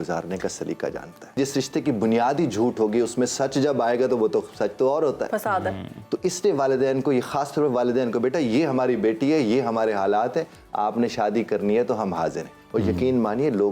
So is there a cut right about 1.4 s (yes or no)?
yes